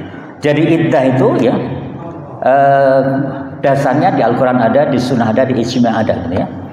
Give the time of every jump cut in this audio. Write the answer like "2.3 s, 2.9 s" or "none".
none

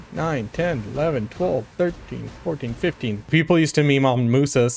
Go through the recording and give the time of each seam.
3.3 s

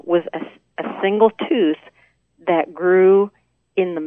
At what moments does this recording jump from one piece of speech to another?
none

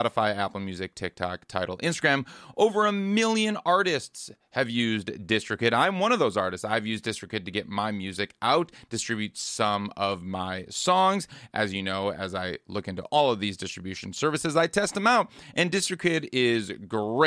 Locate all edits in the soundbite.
none

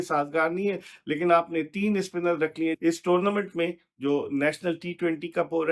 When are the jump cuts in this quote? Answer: 2.8 s

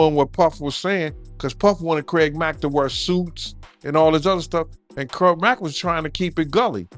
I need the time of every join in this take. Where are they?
none

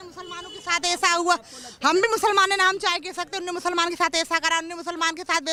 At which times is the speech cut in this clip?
none

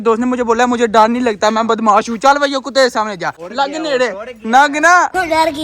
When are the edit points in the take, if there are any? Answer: 3.4 s

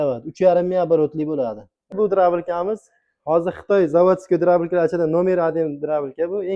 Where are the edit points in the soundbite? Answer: 1.9 s

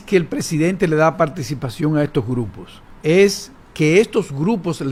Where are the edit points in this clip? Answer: none

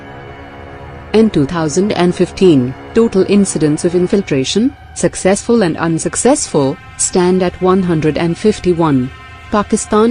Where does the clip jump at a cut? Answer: none

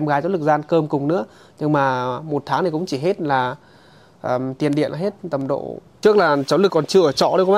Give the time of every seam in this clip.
5.8 s

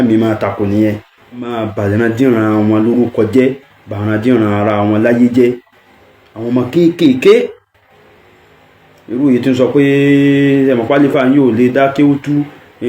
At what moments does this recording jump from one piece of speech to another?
1.6 s

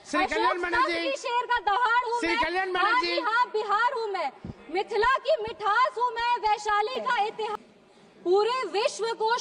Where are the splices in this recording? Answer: 7.5 s

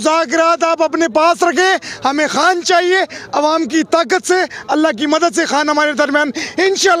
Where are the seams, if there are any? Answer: none

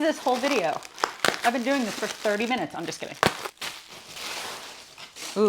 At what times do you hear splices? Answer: none

